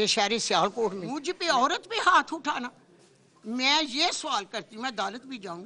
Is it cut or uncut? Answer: cut